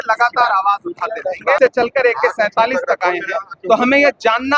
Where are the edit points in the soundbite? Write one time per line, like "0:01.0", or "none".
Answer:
0:01.6